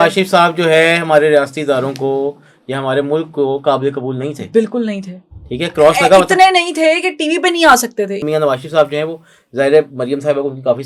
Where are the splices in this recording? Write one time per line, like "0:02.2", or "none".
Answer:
0:08.2